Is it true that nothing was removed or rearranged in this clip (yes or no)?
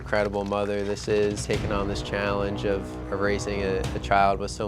no